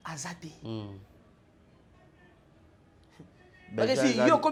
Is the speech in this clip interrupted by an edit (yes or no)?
no